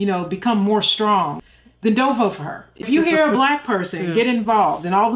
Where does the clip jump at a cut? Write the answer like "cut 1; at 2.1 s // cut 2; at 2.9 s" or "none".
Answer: cut 1; at 1.4 s